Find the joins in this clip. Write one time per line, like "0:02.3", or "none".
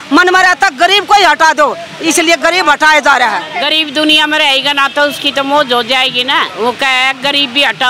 0:03.5
0:06.5